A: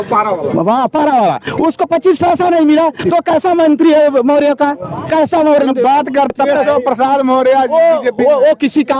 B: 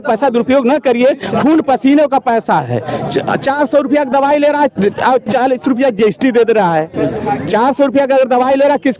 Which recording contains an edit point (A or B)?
A